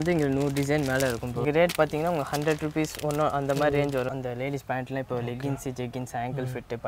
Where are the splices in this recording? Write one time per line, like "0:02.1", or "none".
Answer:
0:01.4
0:04.1